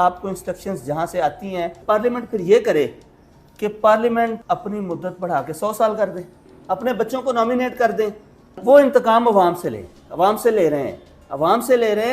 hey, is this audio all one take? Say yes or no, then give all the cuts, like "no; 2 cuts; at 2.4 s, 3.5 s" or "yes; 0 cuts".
no; 2 cuts; at 1.8 s, 8.5 s